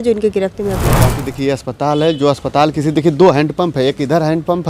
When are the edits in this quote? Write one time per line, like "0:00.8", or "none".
0:01.2